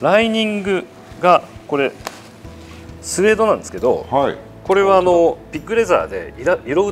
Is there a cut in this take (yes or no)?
no